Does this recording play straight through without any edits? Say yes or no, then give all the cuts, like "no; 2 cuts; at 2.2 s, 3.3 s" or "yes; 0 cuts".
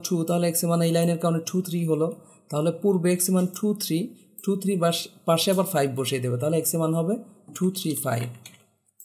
yes; 0 cuts